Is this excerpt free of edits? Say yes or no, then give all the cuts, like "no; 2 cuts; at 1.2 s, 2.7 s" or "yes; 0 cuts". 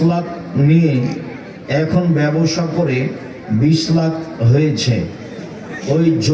yes; 0 cuts